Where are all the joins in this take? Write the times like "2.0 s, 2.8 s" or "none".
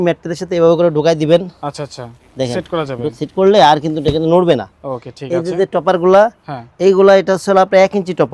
none